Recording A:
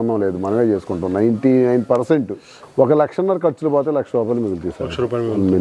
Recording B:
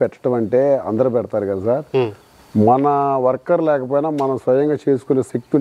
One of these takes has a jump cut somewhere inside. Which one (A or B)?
A